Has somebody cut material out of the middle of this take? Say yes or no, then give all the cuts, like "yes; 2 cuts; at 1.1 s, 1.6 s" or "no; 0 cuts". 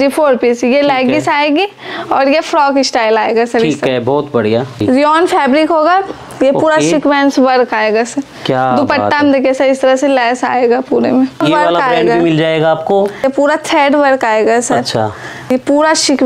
yes; 3 cuts; at 4.8 s, 11.4 s, 15.5 s